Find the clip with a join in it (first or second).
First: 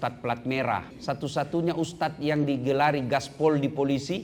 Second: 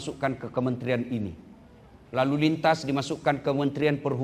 first